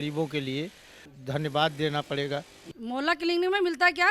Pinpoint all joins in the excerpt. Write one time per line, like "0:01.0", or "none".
0:01.1
0:02.7